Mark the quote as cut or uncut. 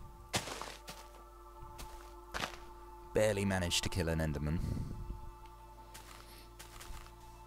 cut